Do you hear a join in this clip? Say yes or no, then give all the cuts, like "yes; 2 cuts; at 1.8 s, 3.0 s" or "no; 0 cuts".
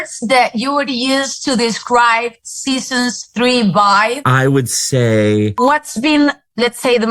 yes; 1 cut; at 5.6 s